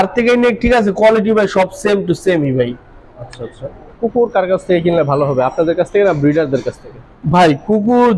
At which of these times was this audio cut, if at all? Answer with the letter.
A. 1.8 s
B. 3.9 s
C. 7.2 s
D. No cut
B